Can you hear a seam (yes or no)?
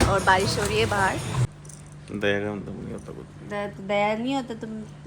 yes